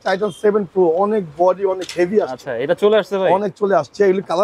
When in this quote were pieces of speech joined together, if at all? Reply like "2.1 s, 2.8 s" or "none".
none